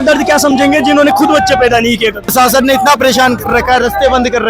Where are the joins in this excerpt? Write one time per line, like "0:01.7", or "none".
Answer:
0:02.2

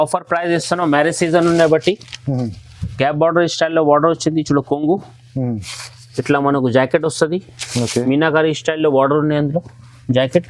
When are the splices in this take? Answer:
none

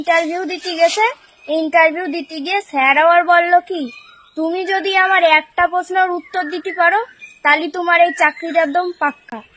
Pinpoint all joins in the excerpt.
none

